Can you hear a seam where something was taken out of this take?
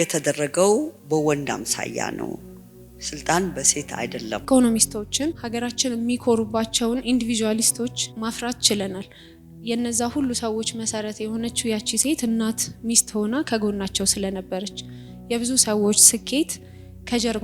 yes; 4 cuts; at 1.0 s, 4.4 s, 5.4 s, 8.1 s

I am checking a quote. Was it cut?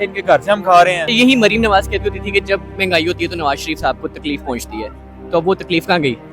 yes; 1 cut; at 1.0 s

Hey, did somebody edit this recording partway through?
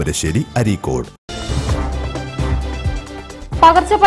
yes; 2 cuts; at 1.3 s, 3.0 s

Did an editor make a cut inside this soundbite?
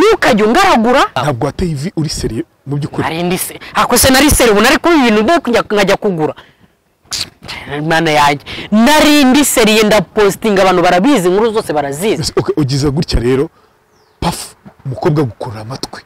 yes; 1 cut; at 1.2 s

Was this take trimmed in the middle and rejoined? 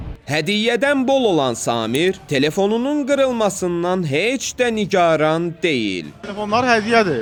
no; 0 cuts

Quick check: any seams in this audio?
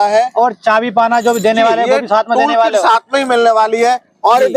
no; 0 cuts

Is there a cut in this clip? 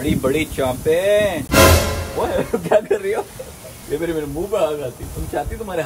yes; 1 cut; at 1.4 s

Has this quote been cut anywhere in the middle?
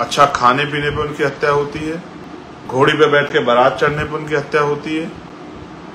no; 0 cuts

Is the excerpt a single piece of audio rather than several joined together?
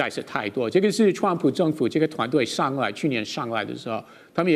yes; 0 cuts

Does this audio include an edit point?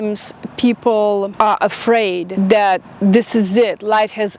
yes; 2 cuts; at 1.3 s, 2.3 s

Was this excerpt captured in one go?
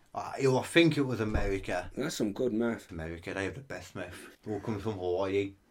no; 2 cuts; at 2.9 s, 4.3 s

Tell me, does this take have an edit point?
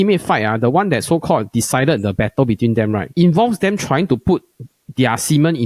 yes; 1 cut; at 3.1 s

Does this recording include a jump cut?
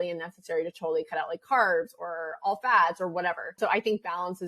yes; 1 cut; at 3.5 s

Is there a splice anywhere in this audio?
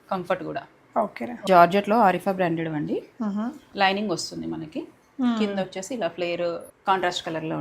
yes; 2 cuts; at 1.5 s, 6.7 s

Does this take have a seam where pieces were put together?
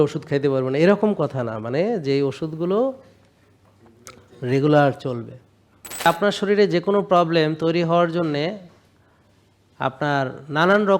yes; 1 cut; at 6.1 s

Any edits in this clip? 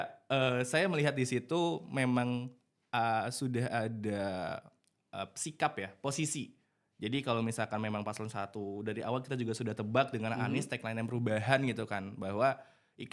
no; 0 cuts

